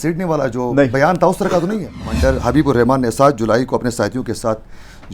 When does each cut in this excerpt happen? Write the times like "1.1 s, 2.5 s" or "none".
2.1 s